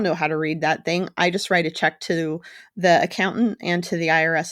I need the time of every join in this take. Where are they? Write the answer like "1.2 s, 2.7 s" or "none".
none

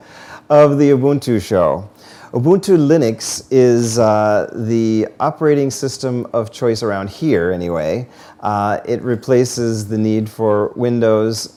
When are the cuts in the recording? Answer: none

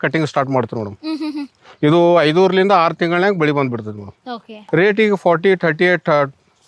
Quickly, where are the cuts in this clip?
4.7 s

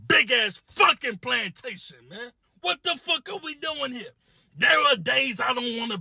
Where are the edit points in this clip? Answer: 2.4 s

